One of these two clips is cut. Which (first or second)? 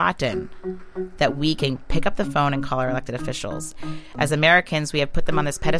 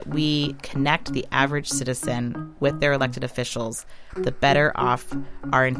first